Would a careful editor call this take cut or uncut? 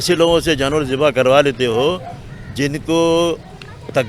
uncut